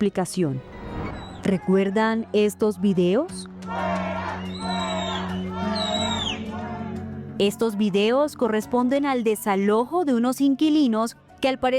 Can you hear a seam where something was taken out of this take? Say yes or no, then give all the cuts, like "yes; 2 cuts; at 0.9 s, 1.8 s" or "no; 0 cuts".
yes; 1 cut; at 1.3 s